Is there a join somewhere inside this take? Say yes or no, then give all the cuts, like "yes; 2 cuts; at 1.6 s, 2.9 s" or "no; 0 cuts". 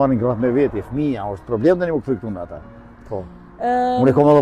no; 0 cuts